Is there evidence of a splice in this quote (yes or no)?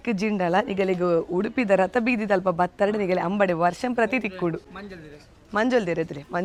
no